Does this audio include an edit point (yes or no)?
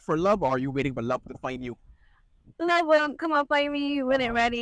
no